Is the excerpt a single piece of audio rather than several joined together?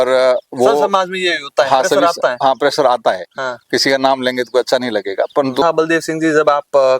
no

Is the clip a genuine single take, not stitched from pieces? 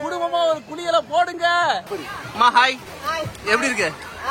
no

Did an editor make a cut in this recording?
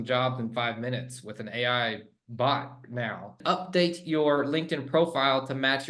yes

